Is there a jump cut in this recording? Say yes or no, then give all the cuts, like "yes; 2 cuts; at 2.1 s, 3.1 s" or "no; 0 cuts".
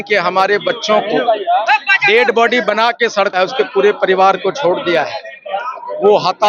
no; 0 cuts